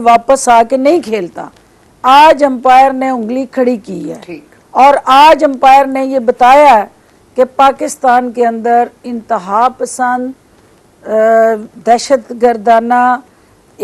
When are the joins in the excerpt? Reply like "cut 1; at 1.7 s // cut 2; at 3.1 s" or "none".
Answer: none